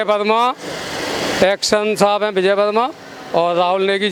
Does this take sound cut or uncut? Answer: uncut